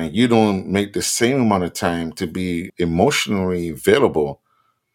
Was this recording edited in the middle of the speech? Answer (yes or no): yes